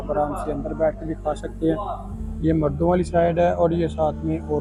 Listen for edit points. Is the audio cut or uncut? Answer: uncut